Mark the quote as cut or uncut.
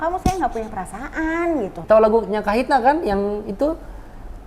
cut